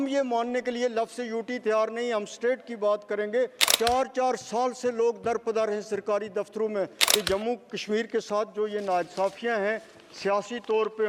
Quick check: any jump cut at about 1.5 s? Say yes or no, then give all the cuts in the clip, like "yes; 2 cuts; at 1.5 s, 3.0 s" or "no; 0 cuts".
no; 2 cuts; at 3.6 s, 7.0 s